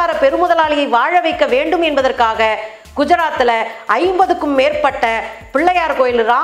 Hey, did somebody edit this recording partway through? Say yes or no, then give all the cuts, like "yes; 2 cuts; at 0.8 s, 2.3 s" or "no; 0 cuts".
no; 0 cuts